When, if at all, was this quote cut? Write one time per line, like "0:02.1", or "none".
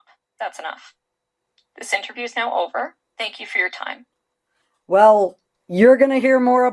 none